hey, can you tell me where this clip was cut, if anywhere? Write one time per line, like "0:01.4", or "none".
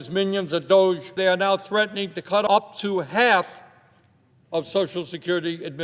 0:01.2
0:02.5

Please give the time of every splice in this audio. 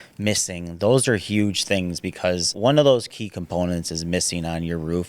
0:02.5

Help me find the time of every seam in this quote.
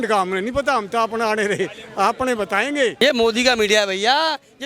0:02.9

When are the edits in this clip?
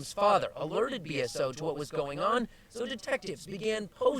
0:01.7

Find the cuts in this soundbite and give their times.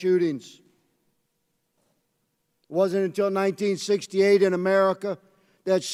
none

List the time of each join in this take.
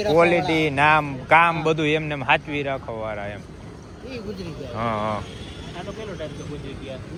none

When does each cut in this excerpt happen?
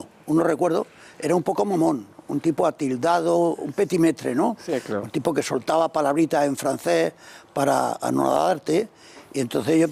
0:06.1

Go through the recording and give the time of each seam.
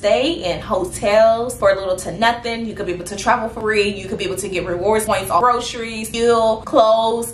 0:03.6
0:05.1

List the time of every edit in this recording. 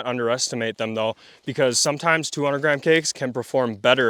none

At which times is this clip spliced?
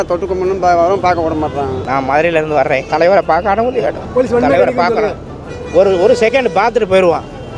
0:01.8
0:02.8
0:04.0

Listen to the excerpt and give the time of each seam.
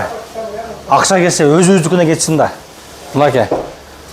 none

